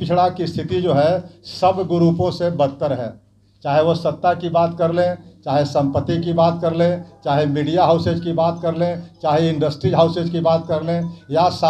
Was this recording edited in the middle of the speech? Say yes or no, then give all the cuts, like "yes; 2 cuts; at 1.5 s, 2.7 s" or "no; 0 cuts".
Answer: no; 0 cuts